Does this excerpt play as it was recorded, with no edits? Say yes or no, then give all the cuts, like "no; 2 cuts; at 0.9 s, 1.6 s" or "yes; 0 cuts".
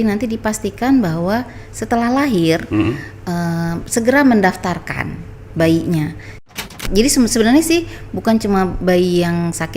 no; 1 cut; at 6.5 s